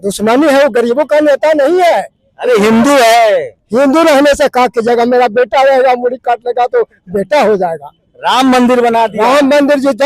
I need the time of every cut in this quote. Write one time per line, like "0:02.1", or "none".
none